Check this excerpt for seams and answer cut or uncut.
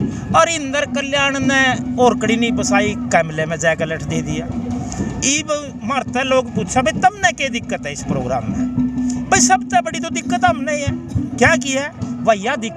uncut